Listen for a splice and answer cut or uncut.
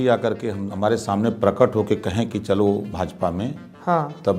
uncut